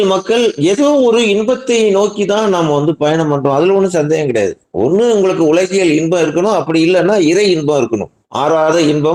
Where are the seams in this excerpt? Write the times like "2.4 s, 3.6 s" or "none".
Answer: 8.2 s